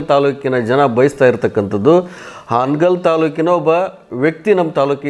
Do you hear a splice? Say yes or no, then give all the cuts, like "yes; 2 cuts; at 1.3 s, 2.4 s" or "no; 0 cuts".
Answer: no; 0 cuts